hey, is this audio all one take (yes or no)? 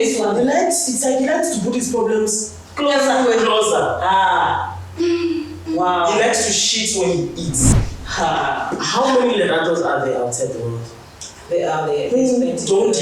no